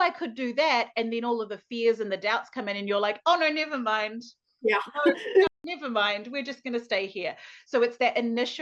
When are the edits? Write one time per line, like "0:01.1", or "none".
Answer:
0:05.5